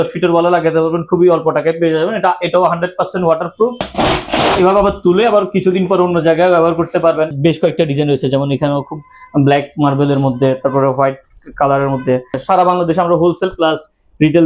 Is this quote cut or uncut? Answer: cut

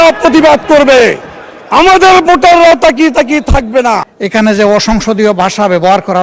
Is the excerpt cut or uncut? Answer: cut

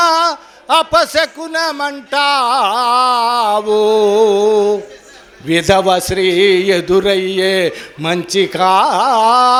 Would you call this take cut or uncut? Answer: uncut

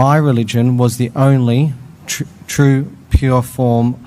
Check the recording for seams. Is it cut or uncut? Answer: uncut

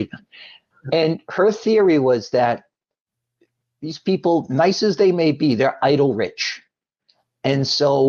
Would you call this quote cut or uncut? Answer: uncut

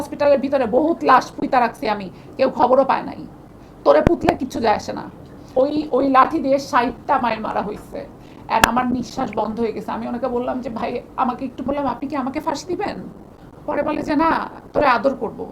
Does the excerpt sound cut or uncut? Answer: cut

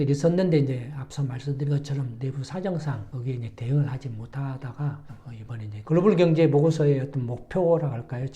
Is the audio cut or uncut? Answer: cut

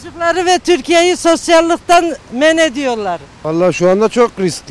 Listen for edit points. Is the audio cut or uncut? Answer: uncut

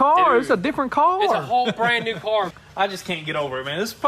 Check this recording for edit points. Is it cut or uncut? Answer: cut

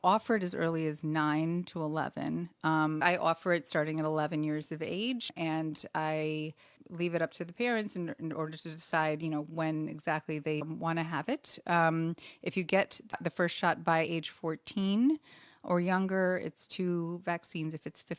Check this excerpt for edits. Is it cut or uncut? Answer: cut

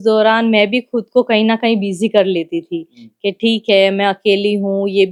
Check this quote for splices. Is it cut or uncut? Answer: uncut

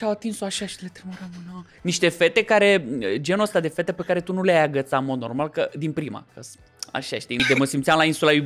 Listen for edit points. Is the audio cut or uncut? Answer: cut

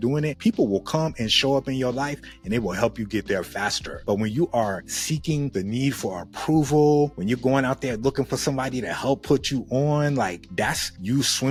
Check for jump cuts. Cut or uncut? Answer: uncut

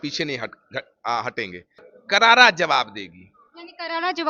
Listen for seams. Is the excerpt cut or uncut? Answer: cut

